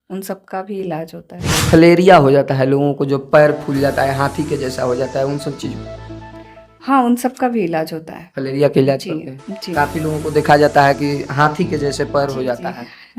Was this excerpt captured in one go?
no; 1 cut; at 1.6 s

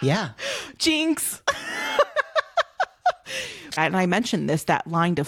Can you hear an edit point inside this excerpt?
yes; 1 cut; at 3.8 s

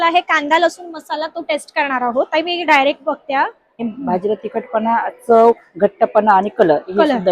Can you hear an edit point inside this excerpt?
yes; 1 cut; at 3.8 s

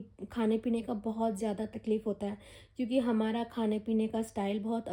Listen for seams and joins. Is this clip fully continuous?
yes; 0 cuts

